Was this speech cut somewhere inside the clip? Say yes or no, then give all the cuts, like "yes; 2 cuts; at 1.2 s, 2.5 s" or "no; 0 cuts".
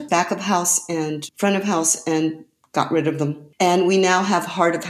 yes; 2 cuts; at 1.3 s, 3.4 s